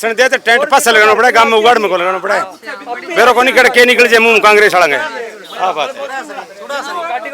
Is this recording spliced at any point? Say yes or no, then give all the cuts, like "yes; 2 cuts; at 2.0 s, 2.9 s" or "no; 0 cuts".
no; 0 cuts